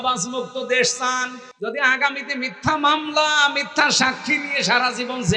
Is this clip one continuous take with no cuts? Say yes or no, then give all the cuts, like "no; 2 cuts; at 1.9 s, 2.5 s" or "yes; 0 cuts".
no; 1 cut; at 1.4 s